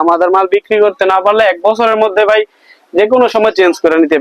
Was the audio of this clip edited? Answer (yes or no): no